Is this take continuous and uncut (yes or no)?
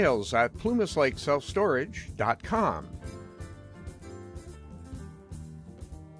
yes